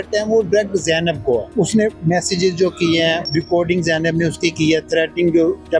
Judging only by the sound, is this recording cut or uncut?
cut